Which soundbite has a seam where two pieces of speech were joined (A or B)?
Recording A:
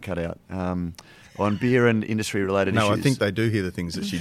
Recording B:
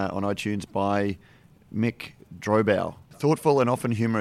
B